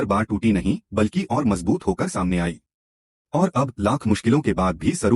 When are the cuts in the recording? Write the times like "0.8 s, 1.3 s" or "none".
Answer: 1.3 s